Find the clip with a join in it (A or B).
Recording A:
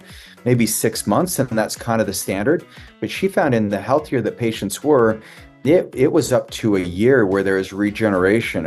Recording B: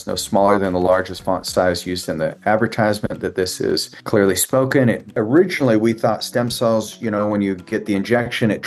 B